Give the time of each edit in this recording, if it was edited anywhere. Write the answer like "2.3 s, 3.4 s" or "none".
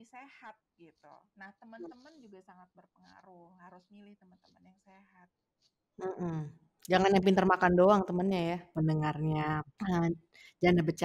8.7 s